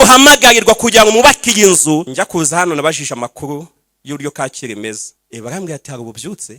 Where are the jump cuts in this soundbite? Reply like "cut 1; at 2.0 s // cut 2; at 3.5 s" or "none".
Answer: cut 1; at 2.1 s // cut 2; at 5.1 s